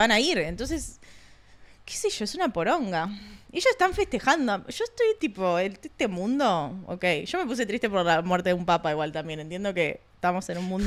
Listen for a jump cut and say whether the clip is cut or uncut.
uncut